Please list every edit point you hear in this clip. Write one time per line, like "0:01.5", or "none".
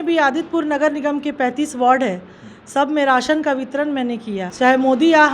none